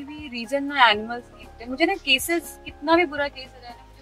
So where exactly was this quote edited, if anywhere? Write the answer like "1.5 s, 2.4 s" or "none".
none